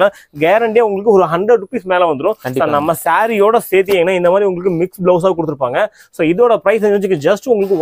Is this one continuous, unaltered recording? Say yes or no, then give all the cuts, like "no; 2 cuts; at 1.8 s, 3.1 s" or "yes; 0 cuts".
yes; 0 cuts